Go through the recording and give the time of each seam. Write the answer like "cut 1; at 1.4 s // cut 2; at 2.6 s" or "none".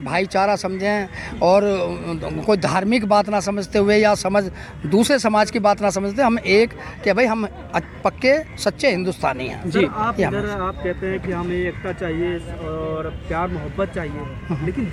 none

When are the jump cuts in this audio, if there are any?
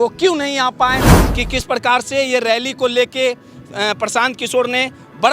cut 1; at 1.1 s

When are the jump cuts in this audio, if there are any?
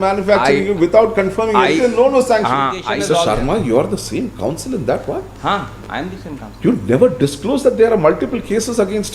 cut 1; at 2.9 s

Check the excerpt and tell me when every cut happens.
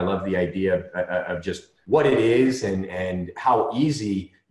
cut 1; at 1.7 s

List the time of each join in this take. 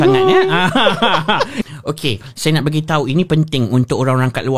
cut 1; at 1.6 s

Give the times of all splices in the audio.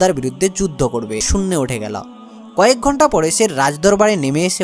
cut 1; at 1.2 s

